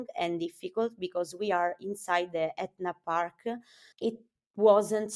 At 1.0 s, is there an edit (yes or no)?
no